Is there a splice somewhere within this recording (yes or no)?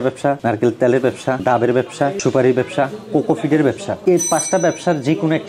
no